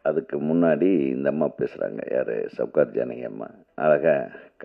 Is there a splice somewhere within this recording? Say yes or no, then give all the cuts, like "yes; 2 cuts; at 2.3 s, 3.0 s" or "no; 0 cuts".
yes; 1 cut; at 3.6 s